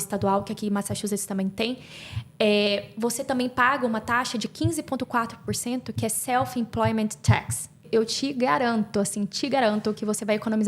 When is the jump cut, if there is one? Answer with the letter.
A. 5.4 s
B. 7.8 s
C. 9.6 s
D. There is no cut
B